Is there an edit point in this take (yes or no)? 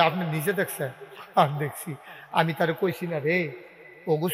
no